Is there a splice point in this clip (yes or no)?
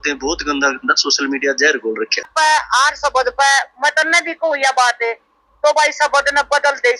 yes